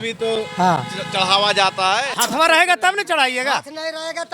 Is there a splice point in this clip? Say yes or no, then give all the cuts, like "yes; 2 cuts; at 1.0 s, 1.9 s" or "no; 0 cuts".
yes; 1 cut; at 2.1 s